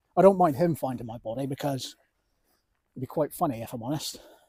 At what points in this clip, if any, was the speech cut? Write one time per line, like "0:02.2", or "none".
none